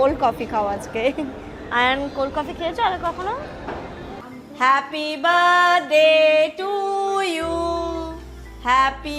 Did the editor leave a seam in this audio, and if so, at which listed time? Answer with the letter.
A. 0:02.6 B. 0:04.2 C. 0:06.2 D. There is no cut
B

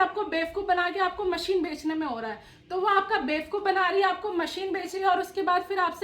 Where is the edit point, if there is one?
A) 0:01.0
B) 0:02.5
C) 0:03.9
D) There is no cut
D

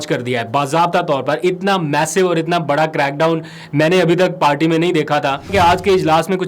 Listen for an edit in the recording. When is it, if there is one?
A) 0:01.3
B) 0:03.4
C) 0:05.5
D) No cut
C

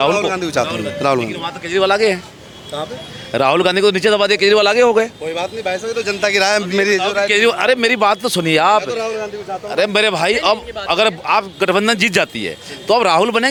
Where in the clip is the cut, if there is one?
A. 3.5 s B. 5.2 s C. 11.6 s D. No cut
D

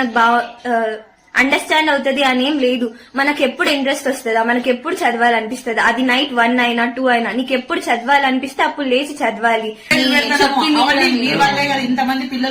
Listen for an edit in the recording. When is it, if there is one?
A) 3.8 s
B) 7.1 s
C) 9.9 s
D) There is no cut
C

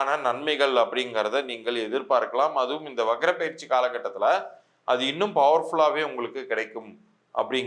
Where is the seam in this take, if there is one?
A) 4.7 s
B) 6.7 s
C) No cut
C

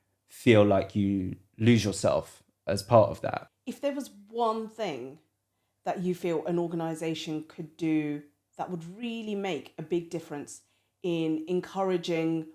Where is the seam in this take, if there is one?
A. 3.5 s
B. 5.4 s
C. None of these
A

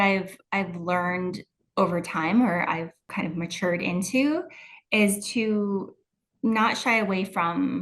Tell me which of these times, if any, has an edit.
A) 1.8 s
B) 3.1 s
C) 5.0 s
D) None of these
B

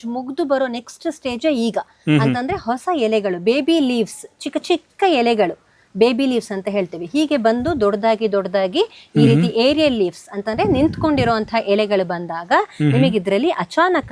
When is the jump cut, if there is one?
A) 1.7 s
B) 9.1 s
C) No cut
C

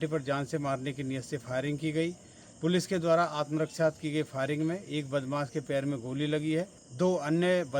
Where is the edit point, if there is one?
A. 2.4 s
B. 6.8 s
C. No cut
B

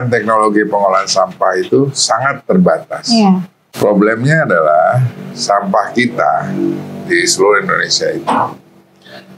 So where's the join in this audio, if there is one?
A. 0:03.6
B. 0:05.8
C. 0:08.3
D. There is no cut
A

